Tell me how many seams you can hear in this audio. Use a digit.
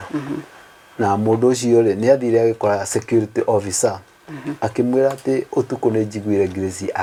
0